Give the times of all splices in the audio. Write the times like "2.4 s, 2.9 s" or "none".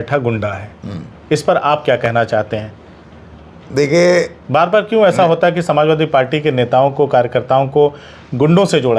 none